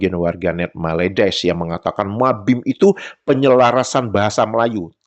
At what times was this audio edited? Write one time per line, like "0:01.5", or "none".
none